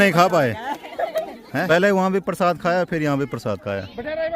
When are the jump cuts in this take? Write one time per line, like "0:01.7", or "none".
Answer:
0:01.6